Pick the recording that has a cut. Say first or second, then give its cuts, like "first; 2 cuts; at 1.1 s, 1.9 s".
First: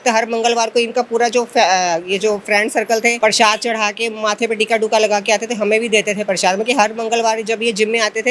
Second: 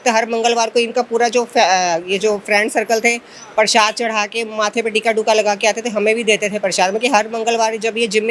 first; 1 cut; at 3.2 s